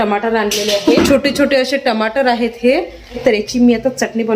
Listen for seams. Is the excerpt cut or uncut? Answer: cut